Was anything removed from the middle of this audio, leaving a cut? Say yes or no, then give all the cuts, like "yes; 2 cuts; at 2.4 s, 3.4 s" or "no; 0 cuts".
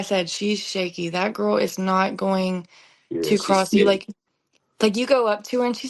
no; 0 cuts